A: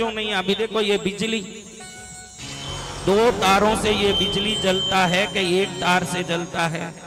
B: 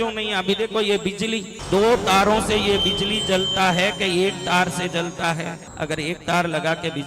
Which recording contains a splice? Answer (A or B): B